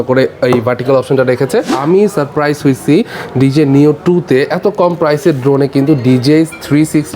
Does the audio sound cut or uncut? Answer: cut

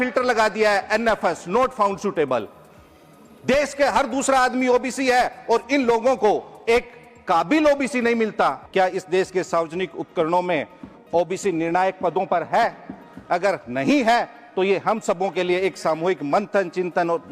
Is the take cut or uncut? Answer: cut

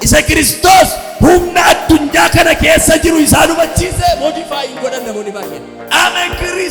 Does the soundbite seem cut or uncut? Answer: uncut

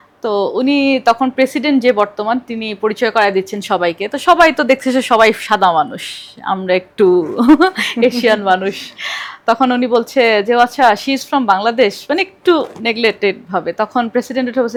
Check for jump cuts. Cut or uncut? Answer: uncut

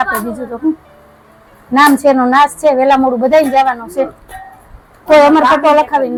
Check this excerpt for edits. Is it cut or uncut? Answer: uncut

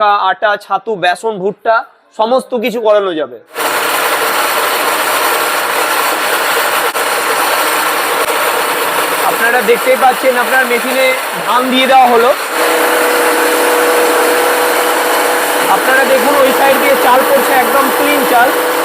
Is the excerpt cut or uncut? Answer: cut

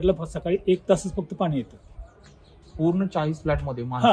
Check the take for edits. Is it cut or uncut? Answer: uncut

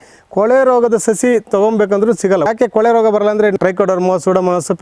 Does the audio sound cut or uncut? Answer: cut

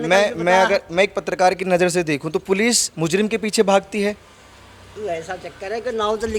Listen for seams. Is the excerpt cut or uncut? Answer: uncut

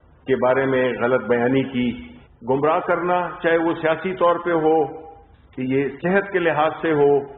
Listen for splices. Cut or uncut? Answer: uncut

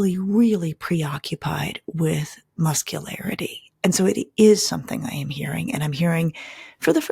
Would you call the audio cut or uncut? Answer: uncut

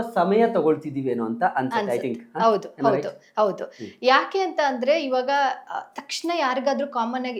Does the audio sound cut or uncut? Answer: uncut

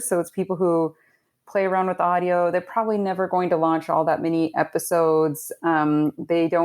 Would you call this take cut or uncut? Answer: uncut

